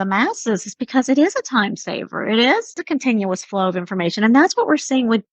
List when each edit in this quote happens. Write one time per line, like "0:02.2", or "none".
0:02.8